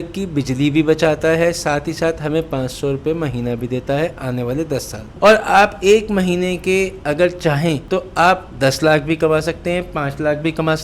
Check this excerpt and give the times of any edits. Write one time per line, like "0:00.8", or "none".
0:05.1

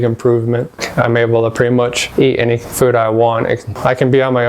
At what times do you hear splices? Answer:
0:00.8
0:02.0
0:03.7

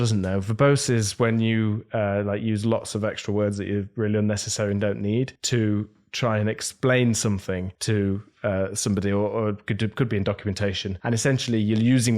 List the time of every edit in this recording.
0:05.4
0:07.7
0:10.9

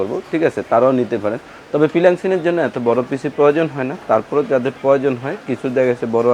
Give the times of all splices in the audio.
none

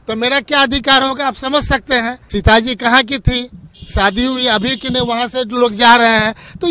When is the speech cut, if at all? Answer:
0:02.2

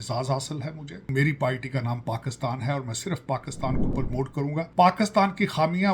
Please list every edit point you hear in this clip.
0:01.1
0:04.1

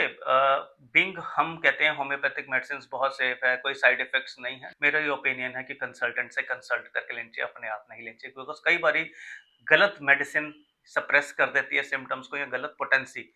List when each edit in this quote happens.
0:04.6

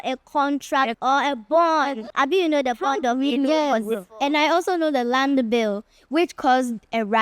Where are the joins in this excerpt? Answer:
0:00.9
0:02.0

